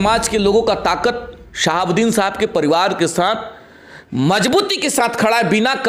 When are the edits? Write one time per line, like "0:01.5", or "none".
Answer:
none